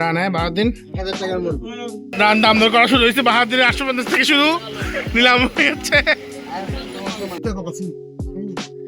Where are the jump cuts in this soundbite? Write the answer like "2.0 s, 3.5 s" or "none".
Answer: 2.1 s, 7.4 s